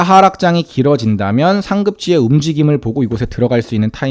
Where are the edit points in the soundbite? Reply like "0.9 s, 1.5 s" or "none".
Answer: none